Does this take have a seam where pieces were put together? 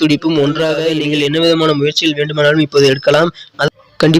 yes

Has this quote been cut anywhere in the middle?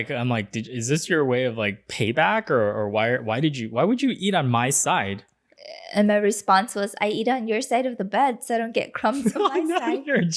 no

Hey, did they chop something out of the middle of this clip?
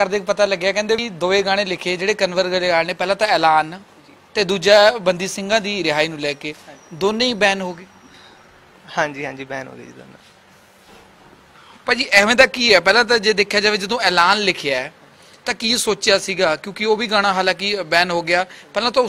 yes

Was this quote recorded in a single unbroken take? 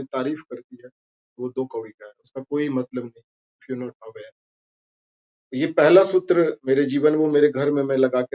yes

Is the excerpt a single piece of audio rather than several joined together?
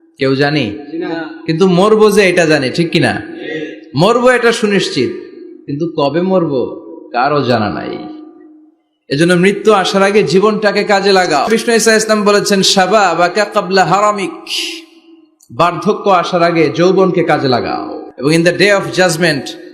no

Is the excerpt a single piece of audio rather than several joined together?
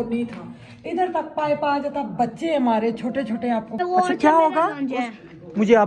no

